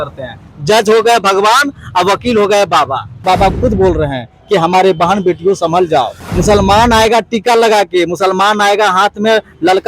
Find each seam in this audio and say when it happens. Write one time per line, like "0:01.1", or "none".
0:03.2
0:06.2

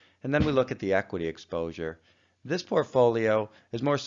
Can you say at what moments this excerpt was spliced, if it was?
0:01.8

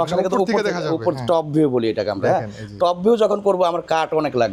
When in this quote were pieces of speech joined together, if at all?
none

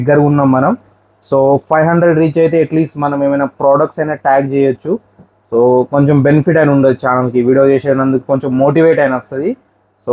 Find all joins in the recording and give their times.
none

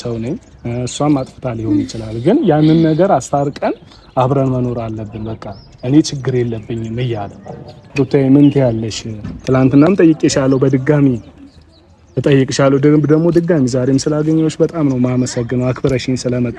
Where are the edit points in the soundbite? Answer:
0:07.8

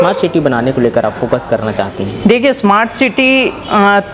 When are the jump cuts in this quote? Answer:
none

